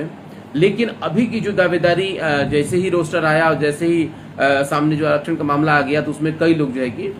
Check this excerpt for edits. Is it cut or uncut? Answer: uncut